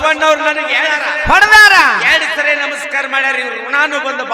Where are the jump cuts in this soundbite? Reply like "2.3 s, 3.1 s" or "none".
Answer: 1.0 s